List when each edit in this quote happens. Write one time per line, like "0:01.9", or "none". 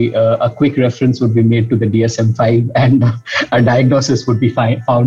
none